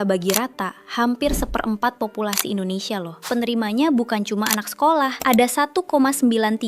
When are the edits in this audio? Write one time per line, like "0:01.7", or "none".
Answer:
0:03.2
0:05.2